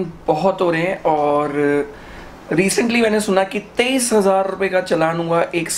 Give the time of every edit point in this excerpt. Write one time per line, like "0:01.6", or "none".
none